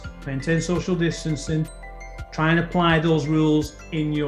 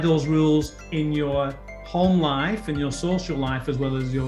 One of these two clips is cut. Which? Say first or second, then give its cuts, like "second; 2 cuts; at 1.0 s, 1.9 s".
first; 1 cut; at 2.1 s